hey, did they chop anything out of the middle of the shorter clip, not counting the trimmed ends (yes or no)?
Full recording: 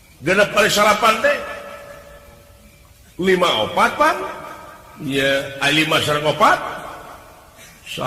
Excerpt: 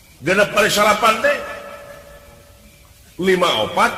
no